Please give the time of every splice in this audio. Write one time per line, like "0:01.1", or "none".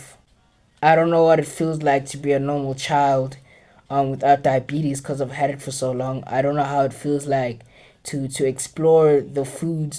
none